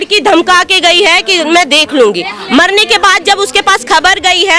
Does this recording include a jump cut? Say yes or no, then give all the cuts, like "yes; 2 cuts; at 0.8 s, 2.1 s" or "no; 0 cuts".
no; 0 cuts